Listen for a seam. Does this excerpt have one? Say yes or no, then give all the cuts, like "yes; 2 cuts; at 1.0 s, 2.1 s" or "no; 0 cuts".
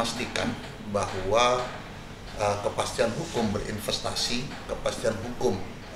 no; 0 cuts